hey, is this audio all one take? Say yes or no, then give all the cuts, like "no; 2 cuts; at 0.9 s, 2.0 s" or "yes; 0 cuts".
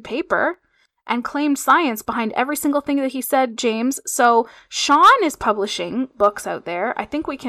yes; 0 cuts